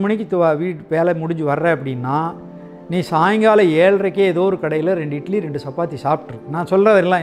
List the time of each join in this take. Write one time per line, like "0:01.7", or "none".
none